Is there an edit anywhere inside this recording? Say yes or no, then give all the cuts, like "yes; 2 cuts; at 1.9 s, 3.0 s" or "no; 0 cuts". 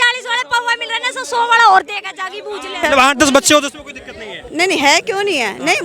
yes; 1 cut; at 2.8 s